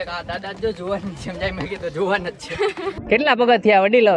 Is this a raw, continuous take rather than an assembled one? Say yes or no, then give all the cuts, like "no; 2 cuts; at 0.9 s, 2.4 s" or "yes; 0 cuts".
no; 1 cut; at 2.9 s